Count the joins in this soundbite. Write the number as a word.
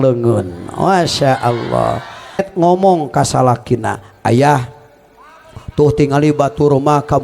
one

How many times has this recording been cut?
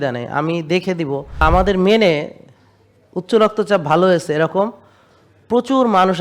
one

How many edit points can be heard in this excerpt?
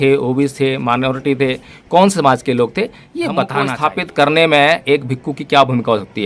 one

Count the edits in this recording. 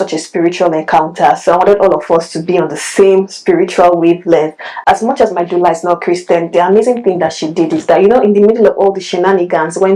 zero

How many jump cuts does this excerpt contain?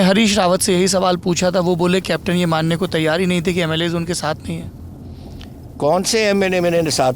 zero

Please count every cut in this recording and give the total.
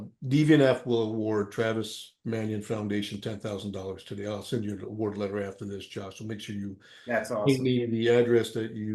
zero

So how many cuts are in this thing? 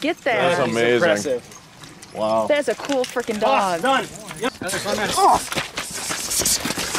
one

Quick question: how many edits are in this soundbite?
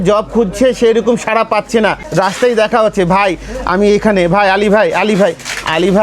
one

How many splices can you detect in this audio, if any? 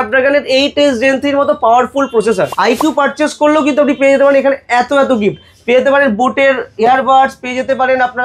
one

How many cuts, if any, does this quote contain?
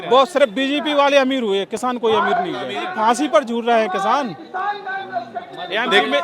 one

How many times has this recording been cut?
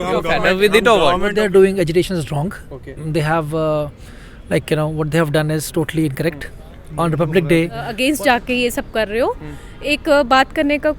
two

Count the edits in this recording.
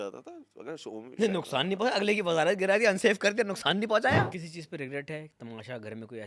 one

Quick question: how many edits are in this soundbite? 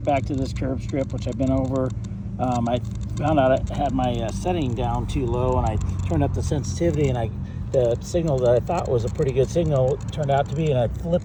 zero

